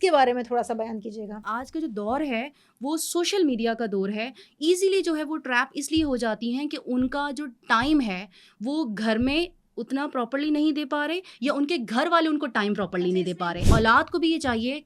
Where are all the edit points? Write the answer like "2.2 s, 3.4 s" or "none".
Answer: 1.4 s, 13.5 s